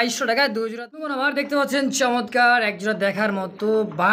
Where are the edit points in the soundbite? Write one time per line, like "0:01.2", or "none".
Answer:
0:01.1